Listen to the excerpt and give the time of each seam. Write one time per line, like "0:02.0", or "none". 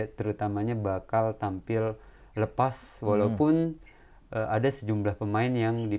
none